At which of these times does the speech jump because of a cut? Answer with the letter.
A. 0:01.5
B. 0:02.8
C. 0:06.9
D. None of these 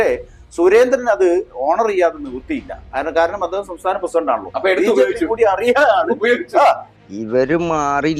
C